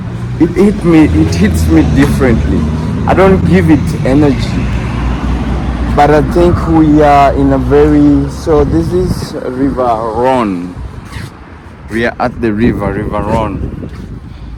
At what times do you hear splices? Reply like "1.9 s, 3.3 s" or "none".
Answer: none